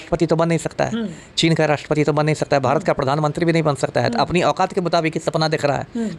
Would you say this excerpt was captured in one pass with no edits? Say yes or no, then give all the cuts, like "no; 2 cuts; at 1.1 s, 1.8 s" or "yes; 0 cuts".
yes; 0 cuts